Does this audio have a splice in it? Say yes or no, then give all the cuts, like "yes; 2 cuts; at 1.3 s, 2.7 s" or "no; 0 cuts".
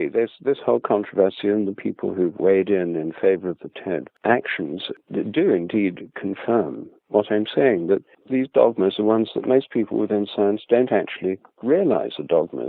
yes; 3 cuts; at 4.1 s, 4.9 s, 8.1 s